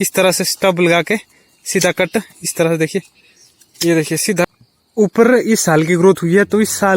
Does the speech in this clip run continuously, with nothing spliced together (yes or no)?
no